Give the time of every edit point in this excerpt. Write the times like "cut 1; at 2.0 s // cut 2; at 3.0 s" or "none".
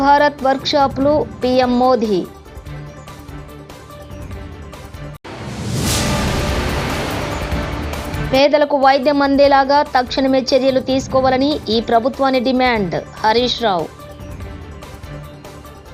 none

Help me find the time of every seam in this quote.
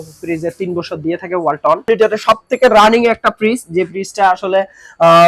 cut 1; at 1.9 s

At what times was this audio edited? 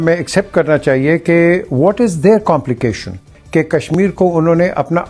cut 1; at 3.8 s

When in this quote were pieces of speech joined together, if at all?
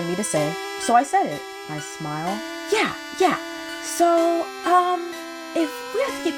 none

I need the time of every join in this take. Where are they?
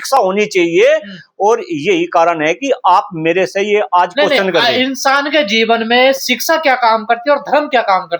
none

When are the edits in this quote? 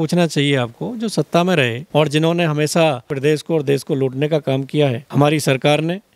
cut 1; at 1.8 s // cut 2; at 3.1 s // cut 3; at 5.0 s

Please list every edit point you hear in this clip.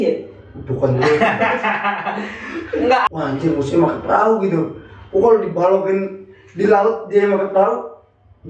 cut 1; at 3.1 s

